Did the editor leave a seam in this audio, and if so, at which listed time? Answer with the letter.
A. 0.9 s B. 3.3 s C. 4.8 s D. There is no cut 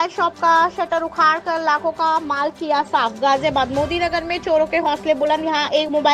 D